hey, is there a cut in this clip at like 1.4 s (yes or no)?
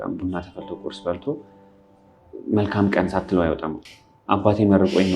no